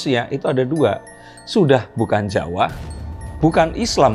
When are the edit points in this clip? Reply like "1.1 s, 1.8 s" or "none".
none